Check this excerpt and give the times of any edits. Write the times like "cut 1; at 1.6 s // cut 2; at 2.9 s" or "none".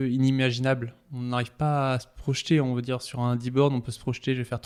none

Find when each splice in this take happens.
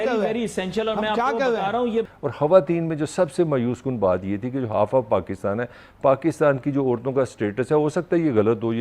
cut 1; at 2.1 s

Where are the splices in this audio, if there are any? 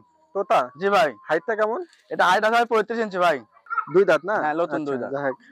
cut 1; at 3.5 s

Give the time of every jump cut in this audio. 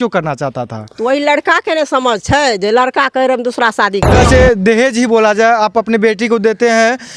cut 1; at 4.1 s

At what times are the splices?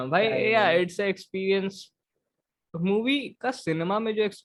none

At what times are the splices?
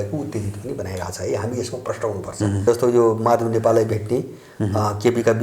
cut 1; at 2.6 s

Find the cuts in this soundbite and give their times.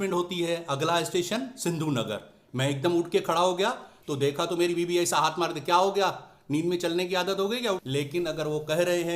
cut 1; at 7.8 s

